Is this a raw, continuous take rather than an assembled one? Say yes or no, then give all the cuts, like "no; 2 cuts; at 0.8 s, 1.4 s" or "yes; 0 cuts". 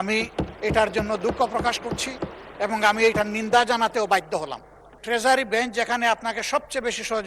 no; 1 cut; at 5.0 s